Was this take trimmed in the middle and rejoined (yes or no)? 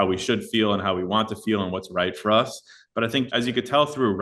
yes